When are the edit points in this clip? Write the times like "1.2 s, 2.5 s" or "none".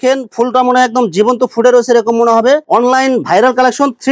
none